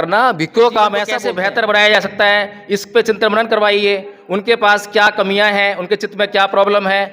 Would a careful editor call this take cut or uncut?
cut